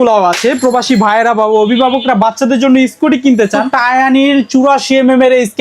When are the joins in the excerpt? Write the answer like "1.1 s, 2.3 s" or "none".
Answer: 3.7 s